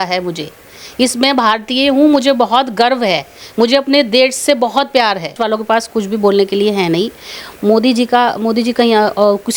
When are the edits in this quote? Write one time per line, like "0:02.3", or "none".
0:05.3